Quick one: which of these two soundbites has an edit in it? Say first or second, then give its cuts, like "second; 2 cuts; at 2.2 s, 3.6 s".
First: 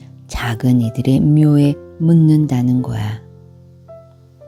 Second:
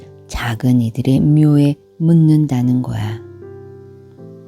second; 1 cut; at 3.1 s